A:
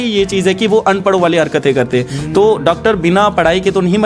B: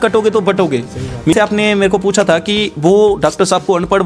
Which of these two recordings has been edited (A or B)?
B